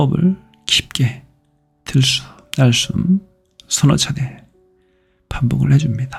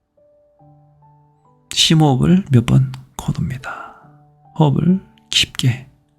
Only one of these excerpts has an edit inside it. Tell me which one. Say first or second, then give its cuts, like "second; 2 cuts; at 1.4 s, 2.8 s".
second; 1 cut; at 1.6 s